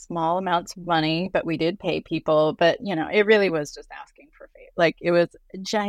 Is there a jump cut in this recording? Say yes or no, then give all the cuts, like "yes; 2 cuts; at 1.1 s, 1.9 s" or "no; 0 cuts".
no; 0 cuts